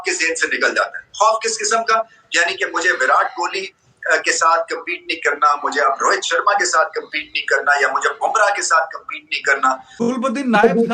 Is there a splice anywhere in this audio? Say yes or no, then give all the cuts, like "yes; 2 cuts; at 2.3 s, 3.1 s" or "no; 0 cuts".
yes; 1 cut; at 9.9 s